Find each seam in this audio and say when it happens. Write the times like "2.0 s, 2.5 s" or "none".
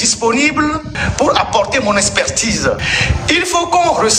2.9 s